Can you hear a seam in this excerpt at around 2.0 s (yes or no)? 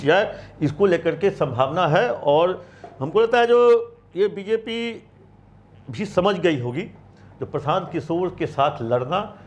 no